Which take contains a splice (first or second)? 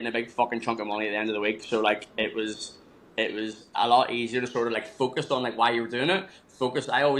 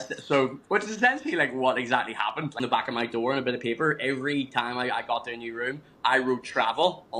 second